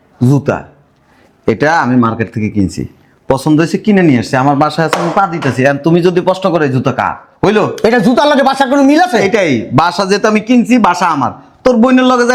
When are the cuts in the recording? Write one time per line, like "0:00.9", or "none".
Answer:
none